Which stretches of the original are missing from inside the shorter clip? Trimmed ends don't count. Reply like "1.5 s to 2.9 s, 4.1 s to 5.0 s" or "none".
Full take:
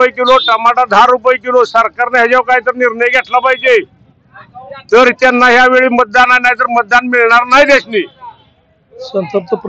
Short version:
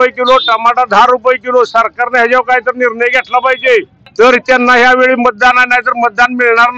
4.0 s to 4.7 s